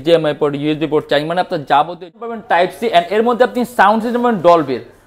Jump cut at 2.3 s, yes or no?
yes